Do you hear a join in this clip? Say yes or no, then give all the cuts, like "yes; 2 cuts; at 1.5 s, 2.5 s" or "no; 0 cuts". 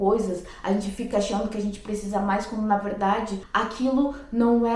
yes; 1 cut; at 3.4 s